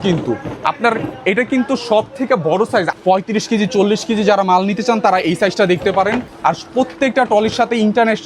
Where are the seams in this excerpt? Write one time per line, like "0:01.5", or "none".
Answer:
0:02.9
0:06.3

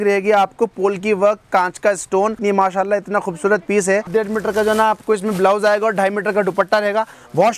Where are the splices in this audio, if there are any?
0:02.4
0:04.1

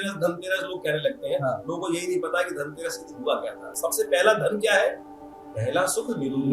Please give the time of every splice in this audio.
0:03.8

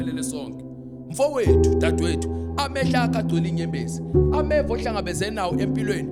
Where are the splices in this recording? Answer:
none

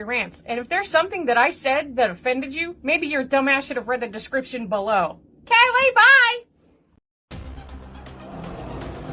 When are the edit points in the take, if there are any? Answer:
0:07.1

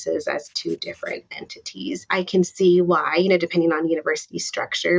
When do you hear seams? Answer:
0:02.1

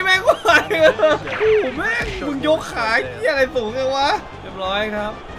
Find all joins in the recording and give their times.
0:01.3
0:04.4

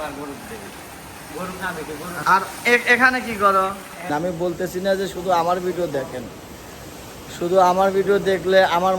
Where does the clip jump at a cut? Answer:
0:02.2
0:04.1

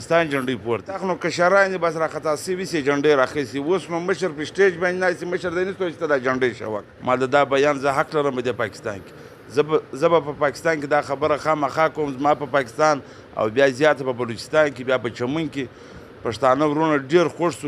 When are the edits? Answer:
0:01.0
0:06.9

